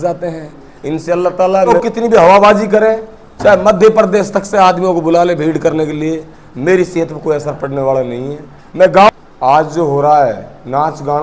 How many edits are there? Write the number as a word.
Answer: two